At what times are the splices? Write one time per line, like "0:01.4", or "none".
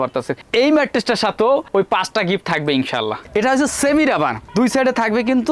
0:03.2